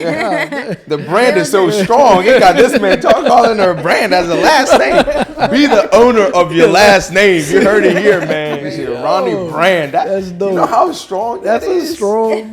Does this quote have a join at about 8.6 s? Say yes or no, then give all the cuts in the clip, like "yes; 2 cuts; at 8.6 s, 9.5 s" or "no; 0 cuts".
yes; 1 cut; at 8.6 s